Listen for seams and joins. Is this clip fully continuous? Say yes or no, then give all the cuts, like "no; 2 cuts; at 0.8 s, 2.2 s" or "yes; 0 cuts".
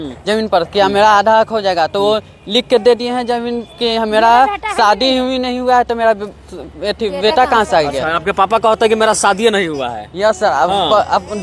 yes; 0 cuts